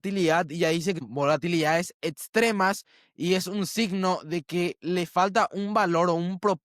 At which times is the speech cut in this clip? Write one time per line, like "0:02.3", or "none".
0:01.0